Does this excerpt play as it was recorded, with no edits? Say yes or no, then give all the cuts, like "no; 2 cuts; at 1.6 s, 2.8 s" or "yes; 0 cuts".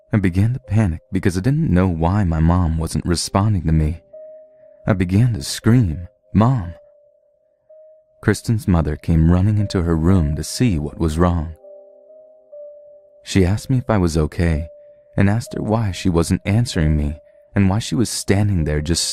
yes; 0 cuts